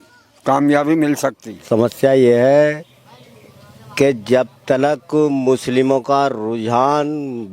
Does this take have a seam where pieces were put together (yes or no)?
yes